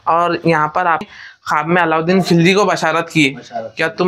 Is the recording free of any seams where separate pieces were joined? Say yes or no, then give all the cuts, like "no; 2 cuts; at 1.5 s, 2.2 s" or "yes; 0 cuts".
no; 1 cut; at 1.1 s